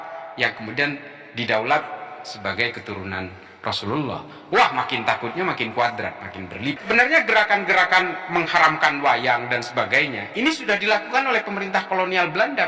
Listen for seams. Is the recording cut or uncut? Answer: cut